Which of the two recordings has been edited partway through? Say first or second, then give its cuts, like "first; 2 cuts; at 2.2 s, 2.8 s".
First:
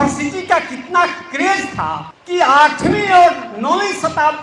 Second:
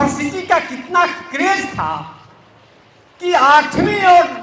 first; 1 cut; at 2.1 s